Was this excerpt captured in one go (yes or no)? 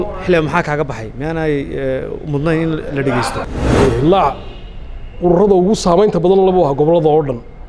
no